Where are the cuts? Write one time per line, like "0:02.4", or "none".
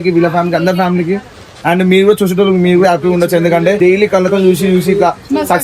0:03.8